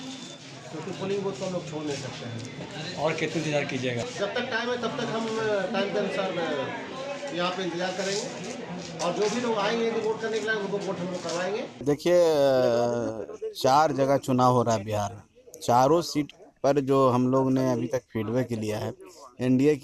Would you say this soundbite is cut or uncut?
uncut